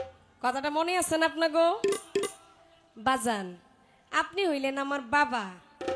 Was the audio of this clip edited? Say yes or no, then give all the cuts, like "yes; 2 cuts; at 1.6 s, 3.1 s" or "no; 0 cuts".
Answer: no; 0 cuts